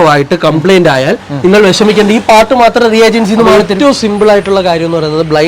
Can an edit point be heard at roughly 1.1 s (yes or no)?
no